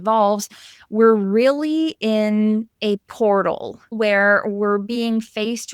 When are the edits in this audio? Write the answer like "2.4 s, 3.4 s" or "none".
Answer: 3.9 s